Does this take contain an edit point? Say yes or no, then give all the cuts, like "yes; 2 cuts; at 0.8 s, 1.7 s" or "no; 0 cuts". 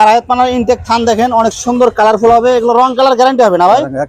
no; 0 cuts